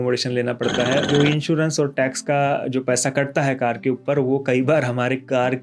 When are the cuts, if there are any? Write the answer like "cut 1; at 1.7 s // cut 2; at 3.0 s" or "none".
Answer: cut 1; at 1.0 s

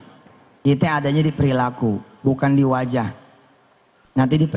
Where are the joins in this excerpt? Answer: none

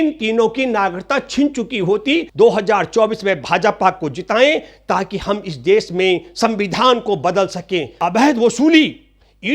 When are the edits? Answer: cut 1; at 2.3 s // cut 2; at 8.0 s

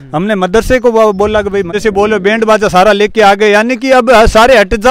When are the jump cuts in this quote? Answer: cut 1; at 1.7 s

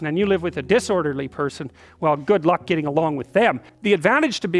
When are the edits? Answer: cut 1; at 3.7 s

